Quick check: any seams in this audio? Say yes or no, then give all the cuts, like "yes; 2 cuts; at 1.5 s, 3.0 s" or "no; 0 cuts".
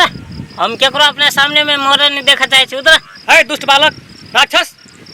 no; 0 cuts